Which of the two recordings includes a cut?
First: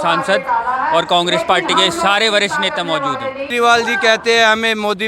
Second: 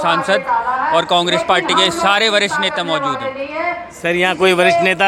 first; 1 cut; at 3.5 s

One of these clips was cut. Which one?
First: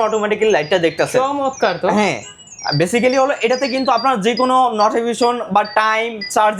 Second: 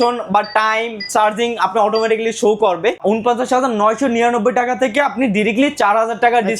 second; 1 cut; at 3.0 s

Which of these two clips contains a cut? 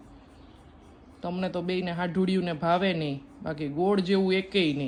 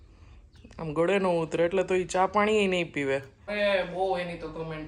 second; 1 cut; at 3.4 s

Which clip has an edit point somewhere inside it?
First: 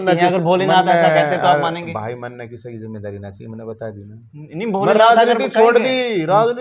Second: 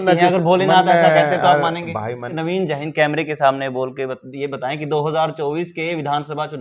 second; 1 cut; at 2.3 s

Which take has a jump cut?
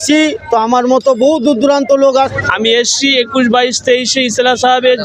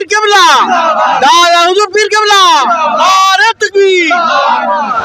first; 1 cut; at 2.3 s

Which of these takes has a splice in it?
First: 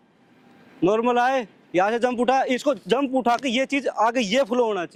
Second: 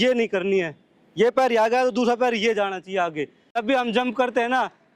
second; 1 cut; at 3.6 s

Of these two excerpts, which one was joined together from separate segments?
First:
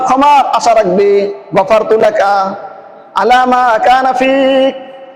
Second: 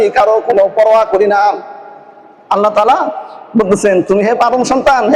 first; 1 cut; at 1.4 s

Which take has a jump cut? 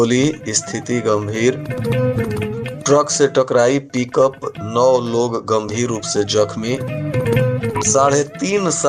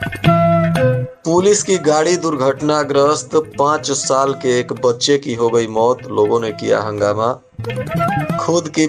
second; 1 cut; at 1.1 s

